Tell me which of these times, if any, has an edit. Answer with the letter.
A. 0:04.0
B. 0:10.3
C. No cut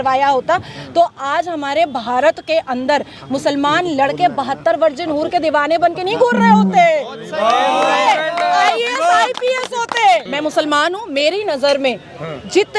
B